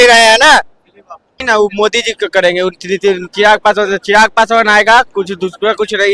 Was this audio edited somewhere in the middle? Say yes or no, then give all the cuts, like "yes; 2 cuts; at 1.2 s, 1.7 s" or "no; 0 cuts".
yes; 1 cut; at 1.4 s